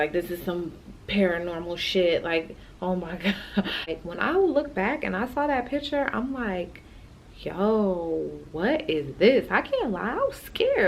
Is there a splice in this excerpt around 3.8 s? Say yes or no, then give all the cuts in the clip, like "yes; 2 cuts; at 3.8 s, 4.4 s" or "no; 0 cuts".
yes; 1 cut; at 3.8 s